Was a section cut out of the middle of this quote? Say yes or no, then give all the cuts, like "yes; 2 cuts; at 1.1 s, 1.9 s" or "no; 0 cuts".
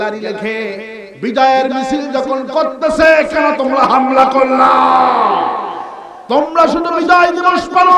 no; 0 cuts